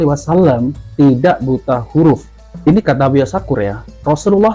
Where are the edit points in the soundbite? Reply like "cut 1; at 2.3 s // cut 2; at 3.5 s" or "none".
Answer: none